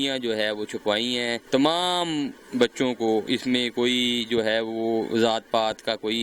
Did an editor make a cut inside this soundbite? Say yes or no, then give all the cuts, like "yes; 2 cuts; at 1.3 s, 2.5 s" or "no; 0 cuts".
yes; 1 cut; at 1.4 s